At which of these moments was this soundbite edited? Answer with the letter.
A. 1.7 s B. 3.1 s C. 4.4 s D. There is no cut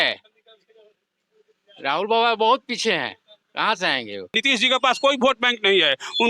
C